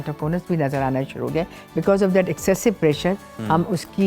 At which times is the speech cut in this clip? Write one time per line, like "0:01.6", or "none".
none